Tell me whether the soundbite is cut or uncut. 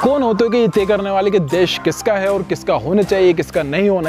uncut